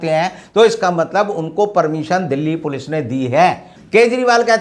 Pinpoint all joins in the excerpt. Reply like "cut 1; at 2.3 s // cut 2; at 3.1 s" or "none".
cut 1; at 3.7 s